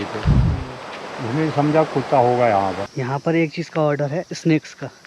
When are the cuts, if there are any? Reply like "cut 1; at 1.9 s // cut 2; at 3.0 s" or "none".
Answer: cut 1; at 2.9 s